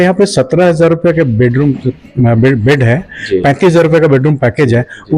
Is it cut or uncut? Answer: uncut